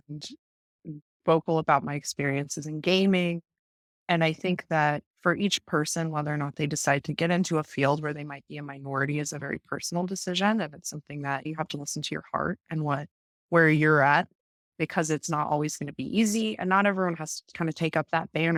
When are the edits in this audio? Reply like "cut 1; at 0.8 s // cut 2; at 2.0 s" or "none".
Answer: none